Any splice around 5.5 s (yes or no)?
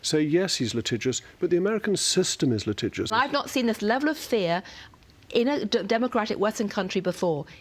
no